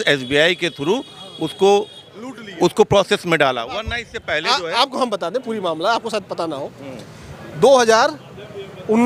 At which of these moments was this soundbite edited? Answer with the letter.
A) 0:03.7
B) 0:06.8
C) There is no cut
C